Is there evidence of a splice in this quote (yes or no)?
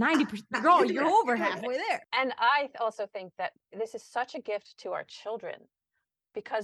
yes